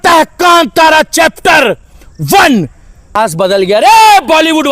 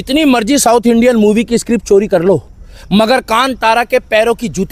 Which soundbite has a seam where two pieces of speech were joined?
first; 1 cut; at 3.1 s

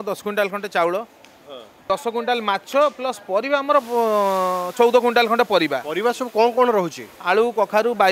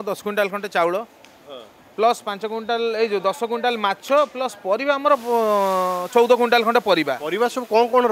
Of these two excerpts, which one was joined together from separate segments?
first; 1 cut; at 1.9 s

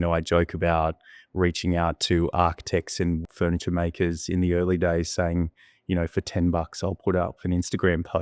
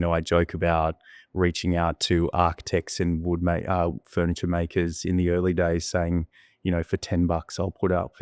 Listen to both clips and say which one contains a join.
first; 1 cut; at 3.2 s

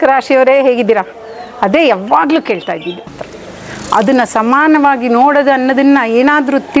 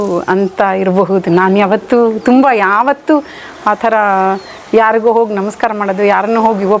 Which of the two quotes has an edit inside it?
first; 1 cut; at 3.2 s

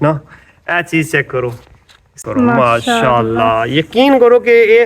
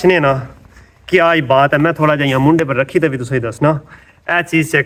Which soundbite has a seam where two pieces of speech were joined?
first; 1 cut; at 2.2 s

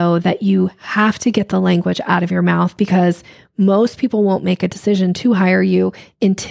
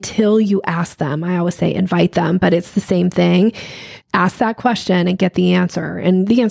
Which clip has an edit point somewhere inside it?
second; 1 cut; at 3.9 s

